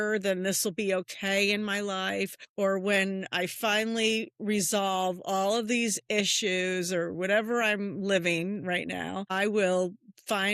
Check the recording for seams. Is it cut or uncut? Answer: cut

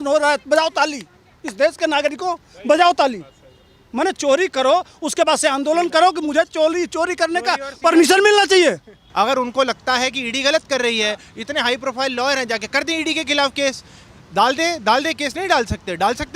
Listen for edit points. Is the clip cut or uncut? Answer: cut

